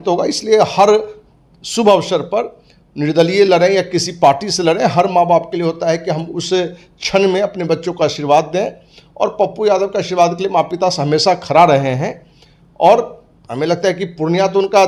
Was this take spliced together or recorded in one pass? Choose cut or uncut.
uncut